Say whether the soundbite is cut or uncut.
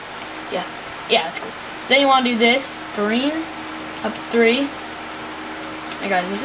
uncut